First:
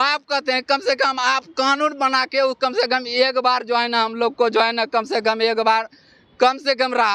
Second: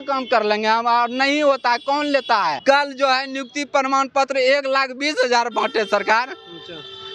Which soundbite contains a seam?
second; 1 cut; at 2.6 s

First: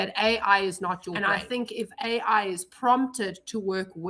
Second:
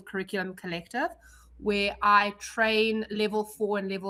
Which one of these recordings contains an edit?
first; 1 cut; at 1.1 s

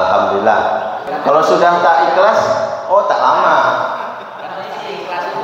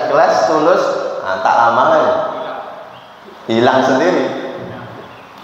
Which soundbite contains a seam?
first; 1 cut; at 1.0 s

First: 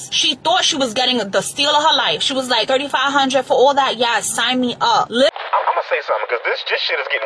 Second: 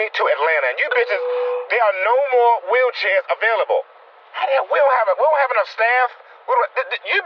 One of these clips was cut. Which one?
first; 1 cut; at 5.3 s

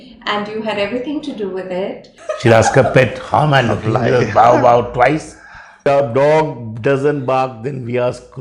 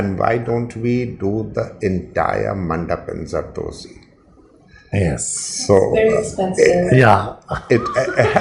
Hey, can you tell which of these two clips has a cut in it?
first; 2 cuts; at 2.1 s, 5.8 s

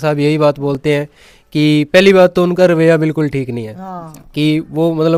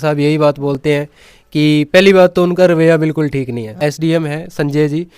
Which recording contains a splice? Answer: second; 1 cut; at 3.7 s

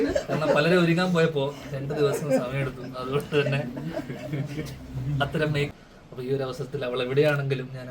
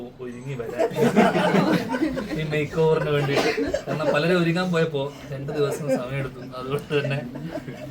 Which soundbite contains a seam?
first; 1 cut; at 5.7 s

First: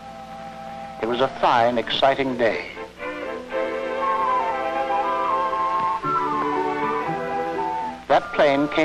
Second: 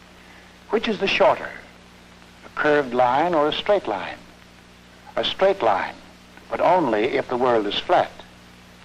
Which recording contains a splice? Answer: second; 1 cut; at 4.2 s

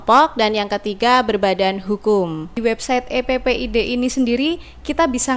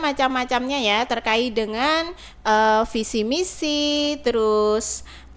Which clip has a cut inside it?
first; 1 cut; at 2.6 s

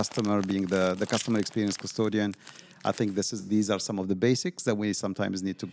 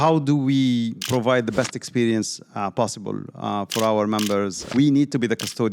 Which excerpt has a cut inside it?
second; 2 cuts; at 1.0 s, 4.6 s

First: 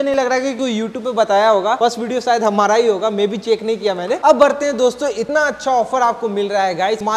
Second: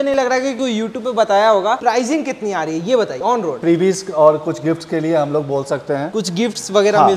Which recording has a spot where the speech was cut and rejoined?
second; 2 cuts; at 1.8 s, 3.6 s

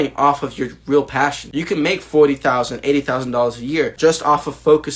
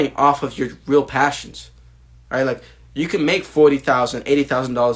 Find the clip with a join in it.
first; 2 cuts; at 1.4 s, 3.9 s

